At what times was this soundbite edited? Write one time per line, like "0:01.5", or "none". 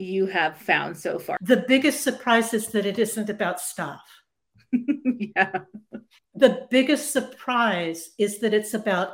0:01.3